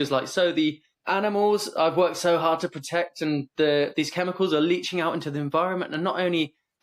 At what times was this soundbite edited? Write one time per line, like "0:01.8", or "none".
0:00.9